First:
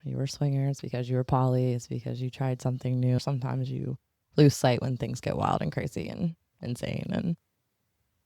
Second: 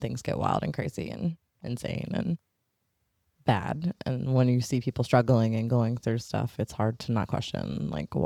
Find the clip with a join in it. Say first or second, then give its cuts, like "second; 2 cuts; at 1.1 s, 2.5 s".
first; 1 cut; at 3.2 s